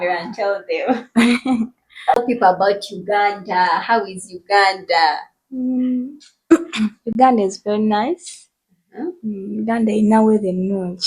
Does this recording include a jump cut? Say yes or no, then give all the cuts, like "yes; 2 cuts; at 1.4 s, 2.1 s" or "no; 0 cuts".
yes; 1 cut; at 2.2 s